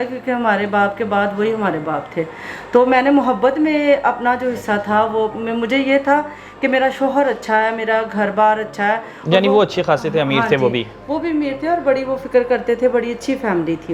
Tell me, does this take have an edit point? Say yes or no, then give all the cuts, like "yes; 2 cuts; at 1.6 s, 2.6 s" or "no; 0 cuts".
no; 0 cuts